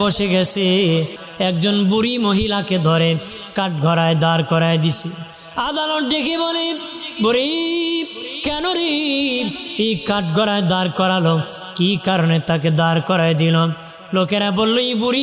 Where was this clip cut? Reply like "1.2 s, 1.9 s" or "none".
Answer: 1.2 s